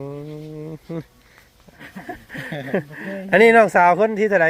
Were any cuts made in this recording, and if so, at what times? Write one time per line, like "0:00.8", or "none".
0:01.9